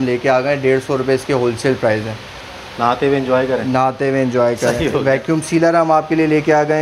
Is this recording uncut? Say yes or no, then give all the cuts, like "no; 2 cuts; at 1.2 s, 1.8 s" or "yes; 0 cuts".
yes; 0 cuts